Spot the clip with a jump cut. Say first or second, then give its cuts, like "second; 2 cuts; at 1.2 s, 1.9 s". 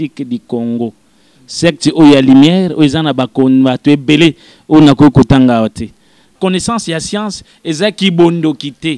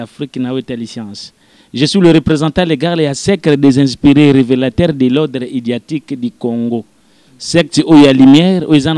first; 1 cut; at 6.3 s